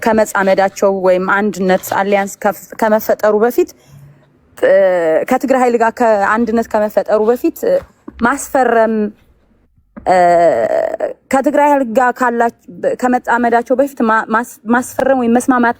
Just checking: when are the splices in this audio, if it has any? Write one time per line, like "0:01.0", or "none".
none